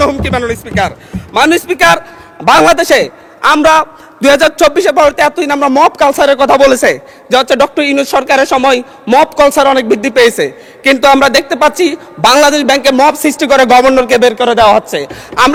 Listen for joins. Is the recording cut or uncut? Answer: uncut